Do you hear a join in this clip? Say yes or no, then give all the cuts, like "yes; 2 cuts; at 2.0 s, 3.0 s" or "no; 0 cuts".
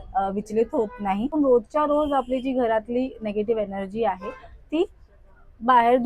yes; 1 cut; at 1.3 s